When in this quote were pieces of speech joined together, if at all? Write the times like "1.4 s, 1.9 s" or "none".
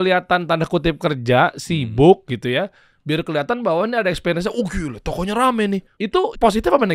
6.0 s

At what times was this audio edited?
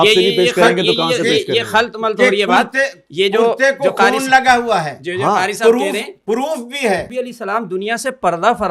7.1 s

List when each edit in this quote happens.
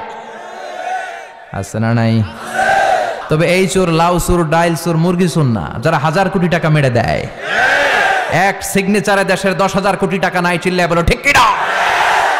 3.2 s

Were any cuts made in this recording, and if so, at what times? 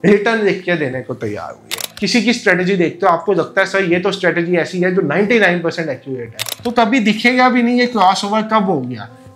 1.8 s, 6.5 s

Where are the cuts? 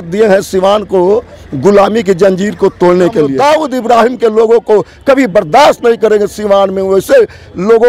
3.3 s

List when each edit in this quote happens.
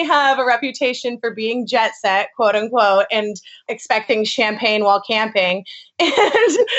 3.6 s

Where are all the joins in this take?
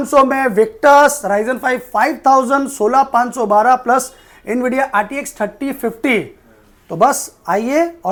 none

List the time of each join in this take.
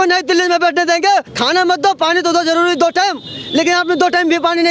1.3 s

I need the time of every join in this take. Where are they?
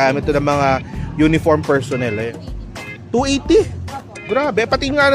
2.4 s

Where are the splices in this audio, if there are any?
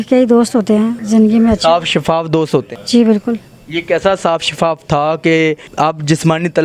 1.0 s, 2.8 s, 5.7 s

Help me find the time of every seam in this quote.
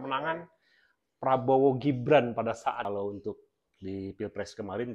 2.9 s

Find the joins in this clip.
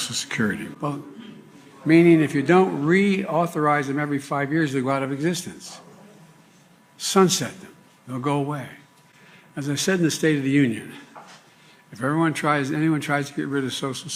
none

